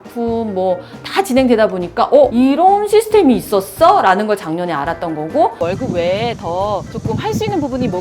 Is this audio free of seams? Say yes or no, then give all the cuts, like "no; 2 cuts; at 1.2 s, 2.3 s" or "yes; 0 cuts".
no; 2 cuts; at 2.3 s, 5.6 s